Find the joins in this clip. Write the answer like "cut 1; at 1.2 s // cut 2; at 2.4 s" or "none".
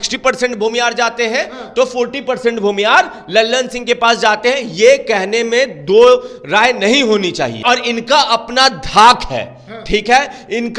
cut 1; at 7.6 s

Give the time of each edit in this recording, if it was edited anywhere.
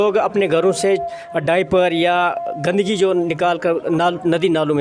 none

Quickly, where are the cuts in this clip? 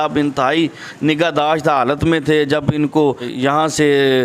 cut 1; at 3.3 s

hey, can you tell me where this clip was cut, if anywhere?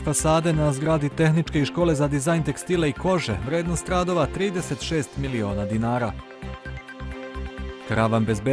none

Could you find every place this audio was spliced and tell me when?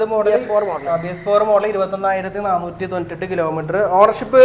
none

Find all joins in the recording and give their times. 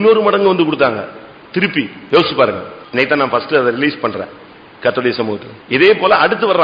cut 1; at 2.0 s // cut 2; at 2.7 s // cut 3; at 5.5 s

